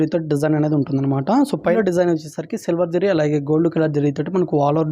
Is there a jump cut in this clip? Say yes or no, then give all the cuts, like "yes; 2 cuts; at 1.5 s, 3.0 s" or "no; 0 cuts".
yes; 1 cut; at 1.8 s